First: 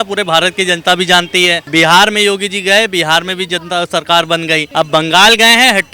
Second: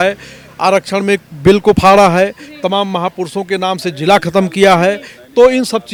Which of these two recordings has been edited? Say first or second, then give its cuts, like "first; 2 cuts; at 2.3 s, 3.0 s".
first; 2 cuts; at 1.6 s, 4.7 s